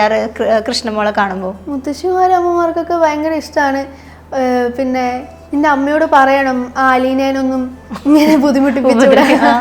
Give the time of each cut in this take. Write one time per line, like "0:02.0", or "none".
none

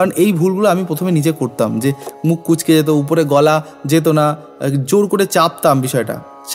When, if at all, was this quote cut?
none

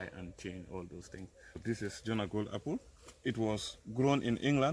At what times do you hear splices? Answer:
0:01.6

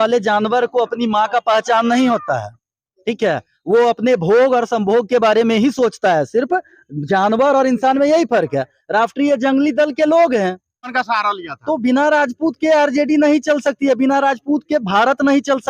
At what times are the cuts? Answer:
0:10.9

